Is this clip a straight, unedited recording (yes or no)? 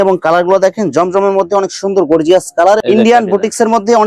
no